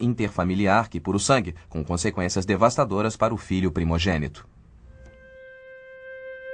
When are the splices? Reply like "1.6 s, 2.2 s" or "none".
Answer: 5.4 s